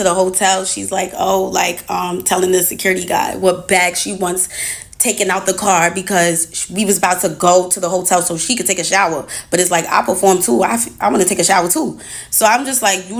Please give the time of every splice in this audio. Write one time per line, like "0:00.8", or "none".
none